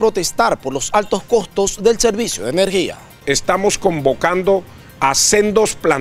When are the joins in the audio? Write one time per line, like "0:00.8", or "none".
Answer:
0:03.2